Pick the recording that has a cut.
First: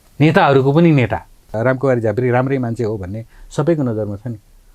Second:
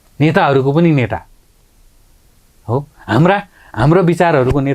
first; 1 cut; at 1.5 s

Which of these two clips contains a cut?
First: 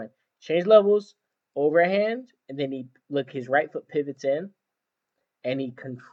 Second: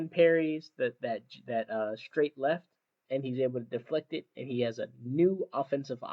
second; 1 cut; at 2.9 s

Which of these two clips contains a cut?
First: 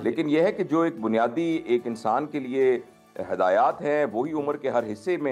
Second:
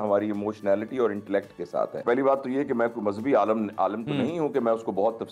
second; 1 cut; at 2.0 s

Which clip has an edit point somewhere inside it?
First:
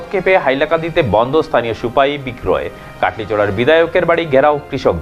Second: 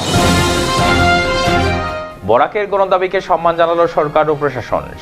second; 1 cut; at 2.0 s

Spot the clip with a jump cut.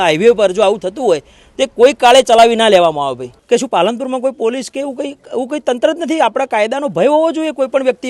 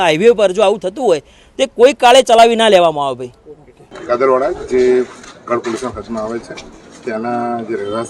first; 1 cut; at 3.3 s

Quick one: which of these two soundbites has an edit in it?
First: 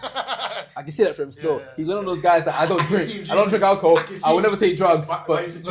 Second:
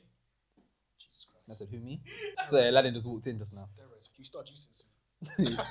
second; 2 cuts; at 2.3 s, 4.1 s

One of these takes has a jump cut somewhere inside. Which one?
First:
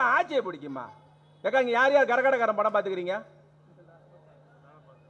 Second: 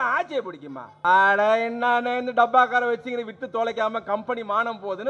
second; 1 cut; at 1.0 s

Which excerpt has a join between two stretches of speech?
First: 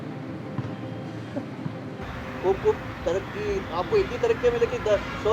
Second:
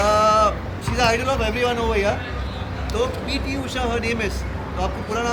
first; 1 cut; at 2.2 s

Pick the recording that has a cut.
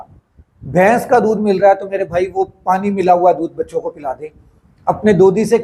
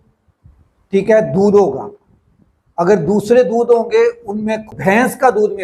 second; 1 cut; at 4.7 s

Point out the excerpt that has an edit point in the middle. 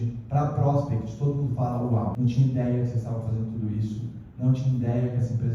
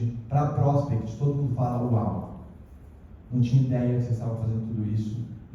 first; 1 cut; at 2.1 s

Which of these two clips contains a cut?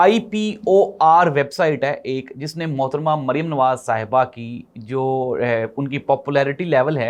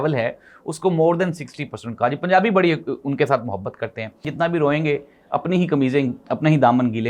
second; 1 cut; at 4.2 s

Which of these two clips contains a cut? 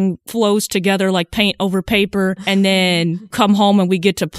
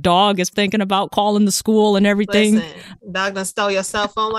first; 2 cuts; at 2.4 s, 3.3 s

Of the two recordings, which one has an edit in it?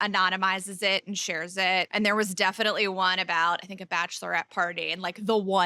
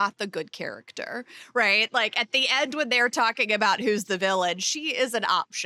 first; 1 cut; at 1.9 s

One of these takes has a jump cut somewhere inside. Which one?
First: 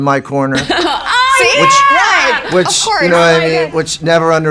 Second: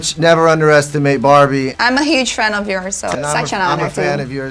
second; 2 cuts; at 1.7 s, 3.1 s

